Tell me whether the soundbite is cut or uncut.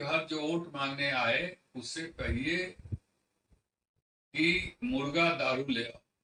uncut